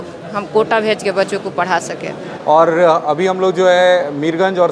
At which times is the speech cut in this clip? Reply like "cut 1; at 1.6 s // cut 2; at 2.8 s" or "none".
cut 1; at 2.2 s